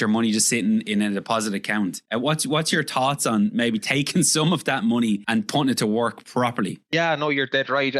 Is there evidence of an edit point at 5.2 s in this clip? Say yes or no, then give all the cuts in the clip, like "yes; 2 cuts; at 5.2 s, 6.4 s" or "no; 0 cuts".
yes; 3 cuts; at 2.0 s, 5.2 s, 6.9 s